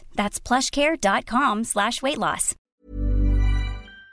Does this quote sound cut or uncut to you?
cut